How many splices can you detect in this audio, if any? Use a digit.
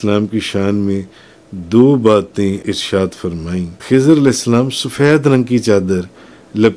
2